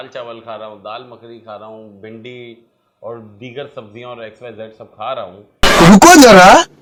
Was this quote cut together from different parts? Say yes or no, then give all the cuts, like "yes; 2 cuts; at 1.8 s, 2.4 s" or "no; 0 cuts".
no; 0 cuts